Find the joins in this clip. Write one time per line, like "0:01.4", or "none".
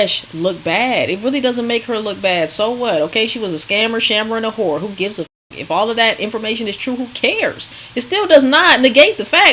none

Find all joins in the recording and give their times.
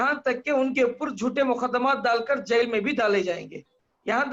none

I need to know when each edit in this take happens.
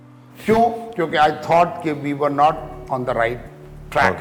none

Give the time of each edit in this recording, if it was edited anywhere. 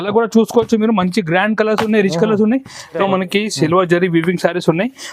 0:03.0

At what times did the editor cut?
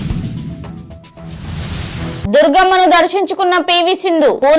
0:02.2

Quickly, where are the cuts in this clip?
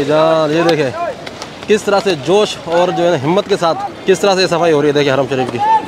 0:03.9

